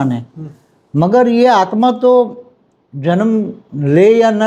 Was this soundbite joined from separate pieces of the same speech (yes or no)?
no